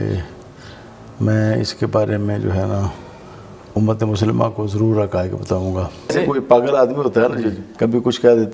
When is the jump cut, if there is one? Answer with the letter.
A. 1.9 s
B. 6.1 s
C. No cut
B